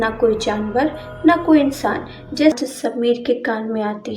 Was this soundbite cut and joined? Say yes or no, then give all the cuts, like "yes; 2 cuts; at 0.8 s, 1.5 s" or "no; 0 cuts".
yes; 1 cut; at 2.6 s